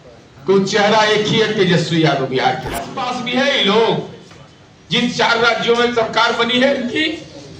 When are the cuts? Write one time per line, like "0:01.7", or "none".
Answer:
0:03.0